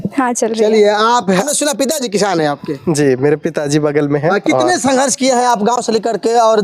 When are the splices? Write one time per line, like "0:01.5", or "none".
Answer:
0:01.4